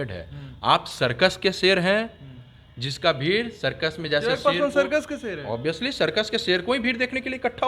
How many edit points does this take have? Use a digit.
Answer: 0